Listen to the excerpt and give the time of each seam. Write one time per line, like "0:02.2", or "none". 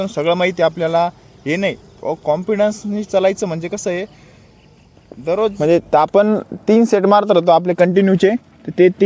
0:05.5

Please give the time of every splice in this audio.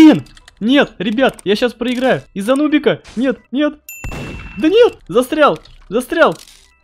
0:02.3
0:03.4
0:05.0

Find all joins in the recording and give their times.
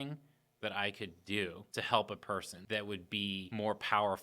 0:01.6
0:02.5
0:03.5

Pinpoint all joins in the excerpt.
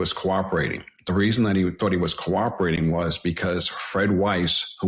none

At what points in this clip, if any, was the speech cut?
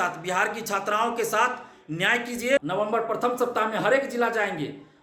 0:02.6

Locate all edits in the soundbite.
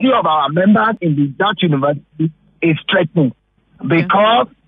0:01.0

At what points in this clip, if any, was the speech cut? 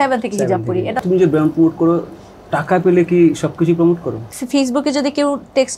0:01.0
0:04.3

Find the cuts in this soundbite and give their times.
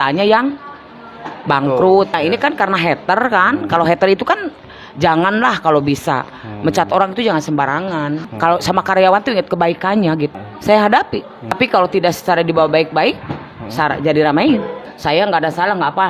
0:02.2
0:08.3
0:10.3
0:11.5
0:14.8

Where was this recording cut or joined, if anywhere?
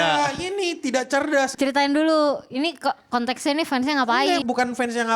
0:01.5
0:04.4

